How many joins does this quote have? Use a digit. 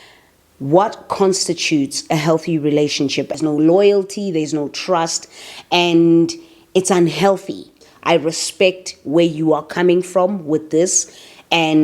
2